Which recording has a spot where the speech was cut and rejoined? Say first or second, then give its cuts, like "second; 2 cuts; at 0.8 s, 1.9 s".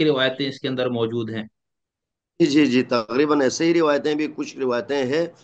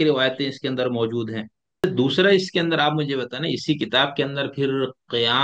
second; 1 cut; at 1.8 s